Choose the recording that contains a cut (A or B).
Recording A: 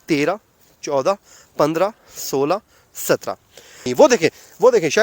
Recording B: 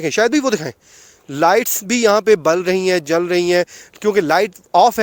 A